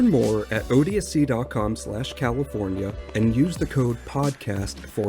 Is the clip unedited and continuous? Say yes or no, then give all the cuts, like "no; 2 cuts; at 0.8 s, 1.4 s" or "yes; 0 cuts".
yes; 0 cuts